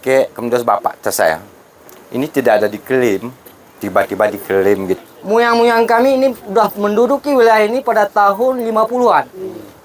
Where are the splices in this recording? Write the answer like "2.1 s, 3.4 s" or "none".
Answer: 4.9 s